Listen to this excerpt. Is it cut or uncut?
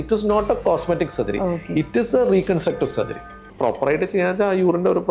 cut